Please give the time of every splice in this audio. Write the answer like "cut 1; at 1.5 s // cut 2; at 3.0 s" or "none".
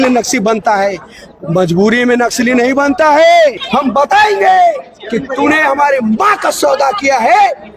cut 1; at 3.6 s